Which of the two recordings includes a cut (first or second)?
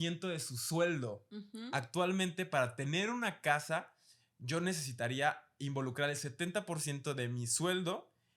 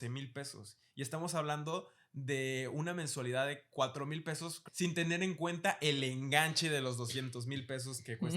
second